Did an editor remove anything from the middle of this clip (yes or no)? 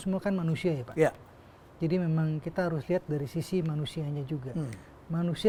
no